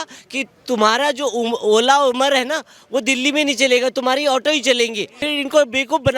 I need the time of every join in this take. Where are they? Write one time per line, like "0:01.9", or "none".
0:05.2